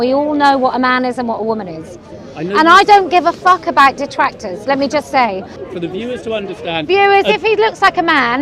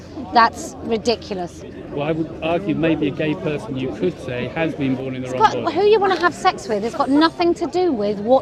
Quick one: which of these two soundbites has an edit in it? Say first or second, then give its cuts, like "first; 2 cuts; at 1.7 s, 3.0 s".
first; 1 cut; at 5.6 s